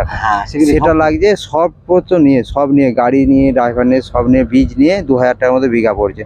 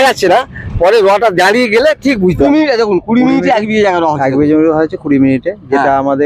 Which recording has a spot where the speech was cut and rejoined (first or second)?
second